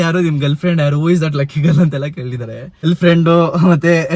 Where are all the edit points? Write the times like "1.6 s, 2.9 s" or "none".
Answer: 2.8 s